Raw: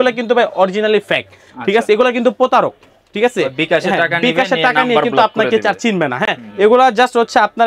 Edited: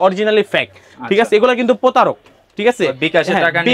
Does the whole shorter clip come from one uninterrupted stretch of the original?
yes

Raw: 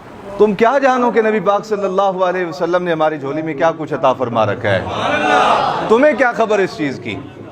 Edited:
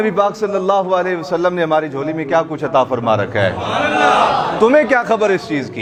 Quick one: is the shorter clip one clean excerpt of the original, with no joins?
yes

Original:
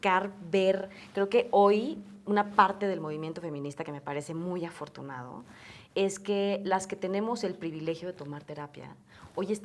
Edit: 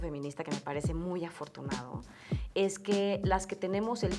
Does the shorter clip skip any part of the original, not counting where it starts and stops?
no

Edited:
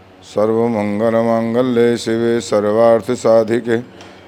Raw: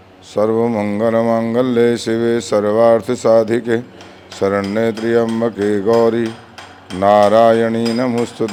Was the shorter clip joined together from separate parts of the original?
no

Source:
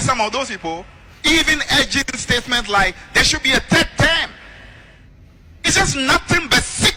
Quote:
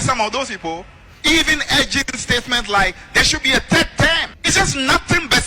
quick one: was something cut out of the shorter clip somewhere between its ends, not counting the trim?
yes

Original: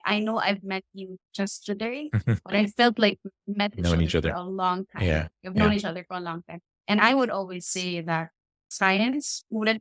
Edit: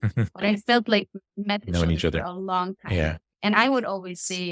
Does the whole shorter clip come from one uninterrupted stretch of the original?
no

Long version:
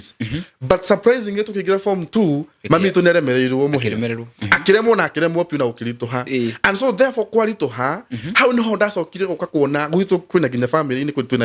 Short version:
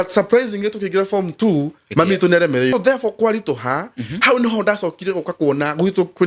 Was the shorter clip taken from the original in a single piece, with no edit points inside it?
no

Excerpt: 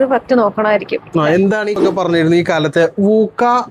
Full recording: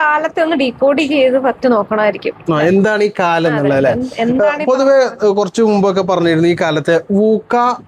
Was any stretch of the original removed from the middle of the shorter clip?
yes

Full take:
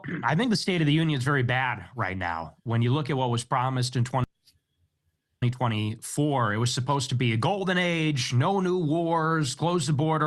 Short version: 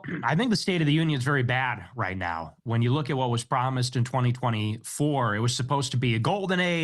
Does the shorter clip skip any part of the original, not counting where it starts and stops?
yes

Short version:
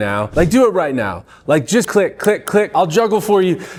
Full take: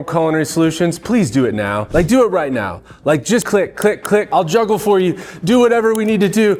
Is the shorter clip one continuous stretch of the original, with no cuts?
yes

